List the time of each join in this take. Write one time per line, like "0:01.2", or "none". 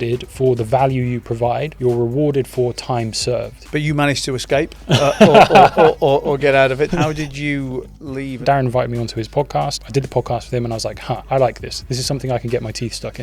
0:01.7
0:03.6
0:04.8
0:06.9
0:08.4
0:09.8
0:11.2